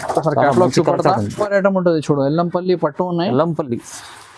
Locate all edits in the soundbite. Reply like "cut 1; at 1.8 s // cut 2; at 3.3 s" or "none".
cut 1; at 1.3 s